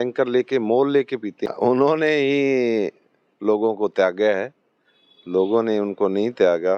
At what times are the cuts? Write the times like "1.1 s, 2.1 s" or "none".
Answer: 1.5 s